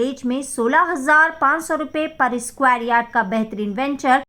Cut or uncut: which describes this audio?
uncut